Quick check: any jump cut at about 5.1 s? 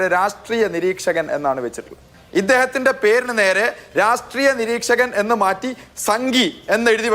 no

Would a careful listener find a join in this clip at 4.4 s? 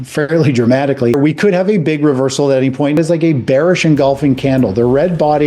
no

